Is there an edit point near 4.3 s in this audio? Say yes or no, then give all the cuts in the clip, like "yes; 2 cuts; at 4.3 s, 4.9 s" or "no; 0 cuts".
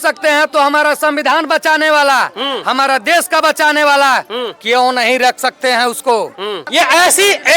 no; 1 cut; at 6.6 s